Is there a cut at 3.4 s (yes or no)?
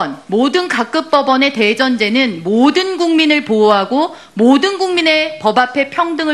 yes